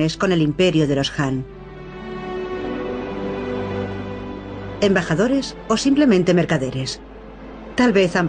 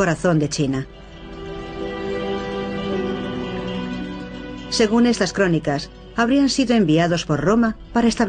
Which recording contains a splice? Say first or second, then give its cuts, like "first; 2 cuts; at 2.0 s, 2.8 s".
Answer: second; 1 cut; at 2.9 s